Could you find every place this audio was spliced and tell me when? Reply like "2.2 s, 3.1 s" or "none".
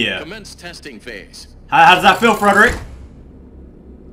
none